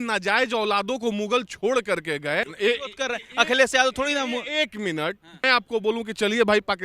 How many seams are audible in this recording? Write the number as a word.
two